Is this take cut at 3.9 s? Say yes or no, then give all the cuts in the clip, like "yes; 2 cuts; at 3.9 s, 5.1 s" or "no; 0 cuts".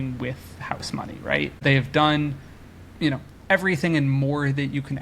no; 1 cut; at 1.6 s